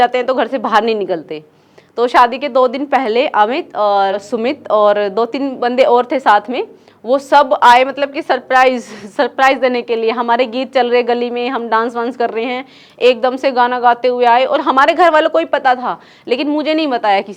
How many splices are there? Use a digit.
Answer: 1